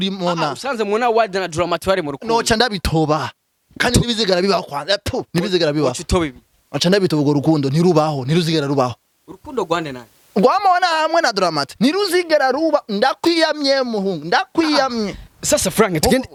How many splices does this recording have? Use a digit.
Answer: 0